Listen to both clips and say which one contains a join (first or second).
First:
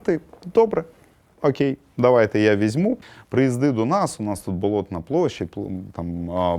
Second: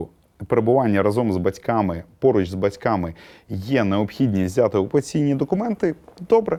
first